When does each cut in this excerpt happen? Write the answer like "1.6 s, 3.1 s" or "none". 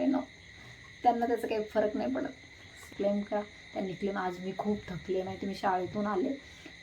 2.8 s